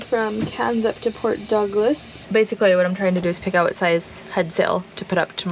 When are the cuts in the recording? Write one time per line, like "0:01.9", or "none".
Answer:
0:02.1

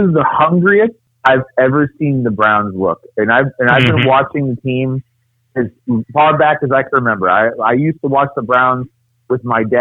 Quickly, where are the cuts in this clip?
0:01.1

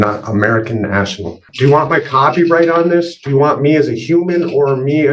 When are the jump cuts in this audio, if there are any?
0:01.5

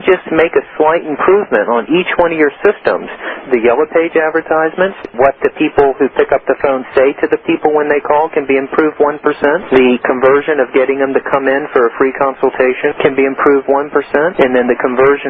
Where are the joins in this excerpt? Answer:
0:03.4
0:05.1
0:09.6
0:12.9
0:14.3

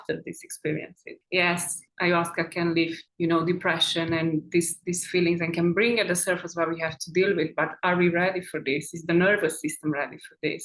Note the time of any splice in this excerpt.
none

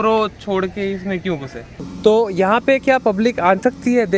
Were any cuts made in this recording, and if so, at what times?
0:01.8

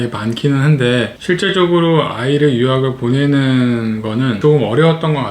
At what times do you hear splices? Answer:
0:04.4

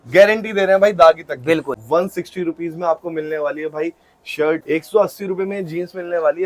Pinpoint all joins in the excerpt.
0:01.7
0:04.6

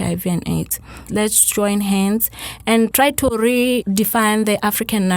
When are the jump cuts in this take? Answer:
0:01.1
0:02.9
0:03.8

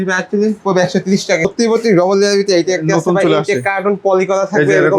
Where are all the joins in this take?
0:01.5

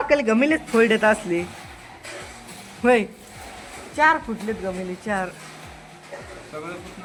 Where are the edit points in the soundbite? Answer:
none

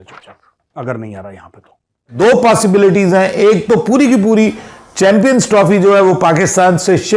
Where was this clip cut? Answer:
0:02.1

